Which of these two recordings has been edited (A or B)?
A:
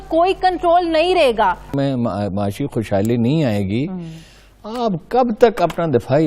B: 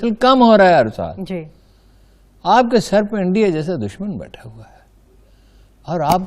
A